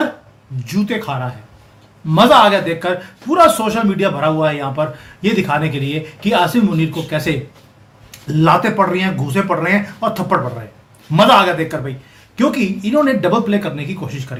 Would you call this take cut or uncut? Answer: uncut